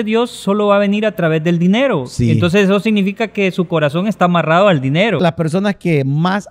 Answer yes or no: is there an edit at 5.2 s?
yes